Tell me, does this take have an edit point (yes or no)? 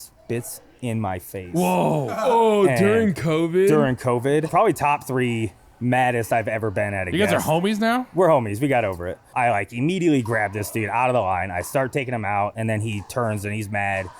yes